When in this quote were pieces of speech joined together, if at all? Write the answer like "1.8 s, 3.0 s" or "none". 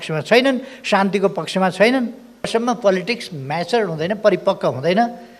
2.5 s